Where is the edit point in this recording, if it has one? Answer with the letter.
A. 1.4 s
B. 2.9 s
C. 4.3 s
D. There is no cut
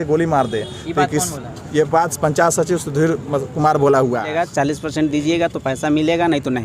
C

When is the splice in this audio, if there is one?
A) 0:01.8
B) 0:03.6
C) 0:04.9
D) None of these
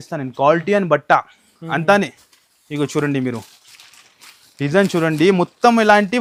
D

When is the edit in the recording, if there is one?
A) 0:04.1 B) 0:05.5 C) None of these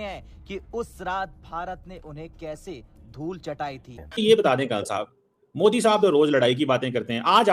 A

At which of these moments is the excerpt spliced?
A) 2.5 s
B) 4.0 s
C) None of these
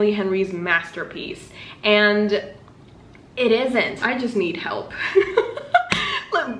B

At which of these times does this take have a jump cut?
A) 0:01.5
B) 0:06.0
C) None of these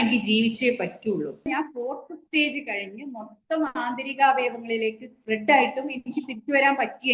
A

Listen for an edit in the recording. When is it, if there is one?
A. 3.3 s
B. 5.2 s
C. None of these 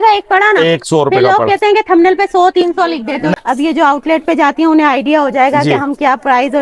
A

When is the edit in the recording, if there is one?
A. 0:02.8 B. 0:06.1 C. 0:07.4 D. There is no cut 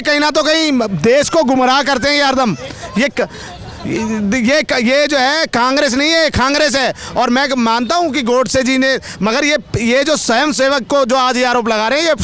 D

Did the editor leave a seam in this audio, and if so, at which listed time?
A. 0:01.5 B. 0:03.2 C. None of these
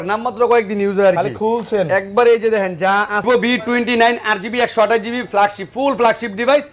B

